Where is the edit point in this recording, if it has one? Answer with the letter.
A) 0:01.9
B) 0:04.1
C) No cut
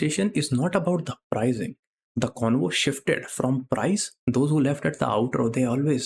B